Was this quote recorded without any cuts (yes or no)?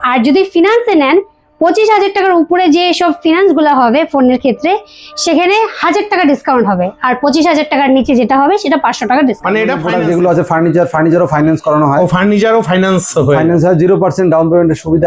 no